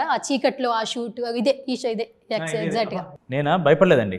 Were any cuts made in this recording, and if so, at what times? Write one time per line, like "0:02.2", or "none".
0:03.2